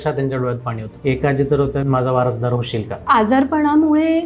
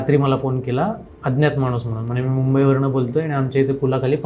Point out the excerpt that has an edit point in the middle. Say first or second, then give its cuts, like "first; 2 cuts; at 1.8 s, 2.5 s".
first; 3 cuts; at 0.9 s, 1.8 s, 3.0 s